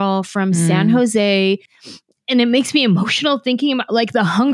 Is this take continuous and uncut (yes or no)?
no